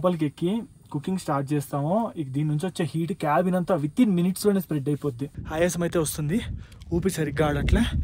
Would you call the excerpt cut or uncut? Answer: cut